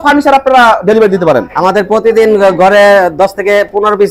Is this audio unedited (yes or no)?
yes